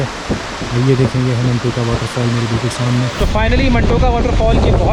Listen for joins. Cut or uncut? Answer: cut